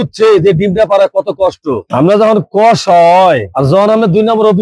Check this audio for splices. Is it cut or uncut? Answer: cut